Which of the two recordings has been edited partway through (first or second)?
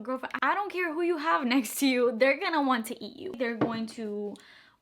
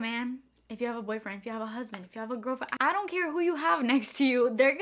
first